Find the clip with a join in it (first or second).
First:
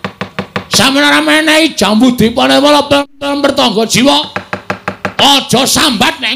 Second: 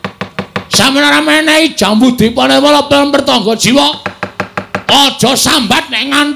second